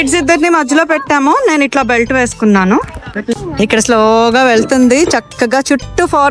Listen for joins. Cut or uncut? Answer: cut